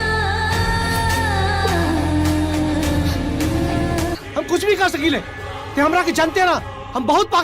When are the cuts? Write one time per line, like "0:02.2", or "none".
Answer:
0:04.2